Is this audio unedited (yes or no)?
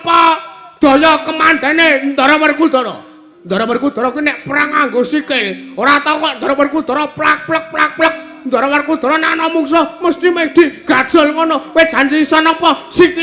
yes